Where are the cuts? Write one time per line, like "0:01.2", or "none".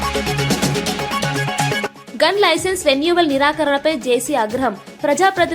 0:01.9